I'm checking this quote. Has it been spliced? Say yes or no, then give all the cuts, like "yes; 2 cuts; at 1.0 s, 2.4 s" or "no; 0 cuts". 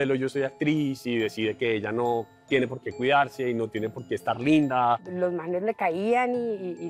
no; 0 cuts